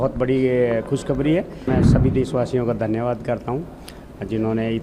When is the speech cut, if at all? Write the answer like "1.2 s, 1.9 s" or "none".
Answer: 1.7 s

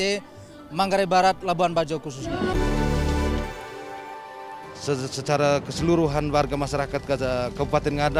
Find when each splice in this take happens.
2.5 s

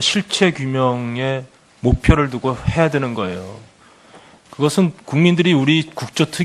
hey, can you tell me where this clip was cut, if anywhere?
none

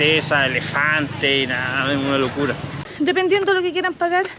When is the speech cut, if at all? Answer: 2.8 s

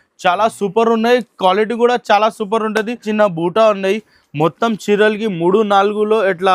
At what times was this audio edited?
3.1 s

